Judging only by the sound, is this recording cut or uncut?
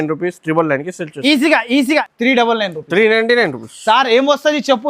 cut